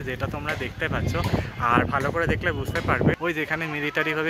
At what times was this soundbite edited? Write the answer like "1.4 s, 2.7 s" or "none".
3.2 s